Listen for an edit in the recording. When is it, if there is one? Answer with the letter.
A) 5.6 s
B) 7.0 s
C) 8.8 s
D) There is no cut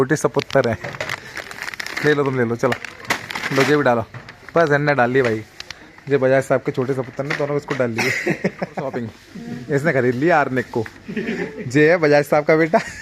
C